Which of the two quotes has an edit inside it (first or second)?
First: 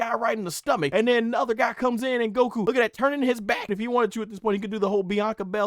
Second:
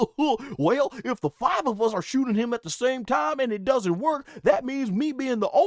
first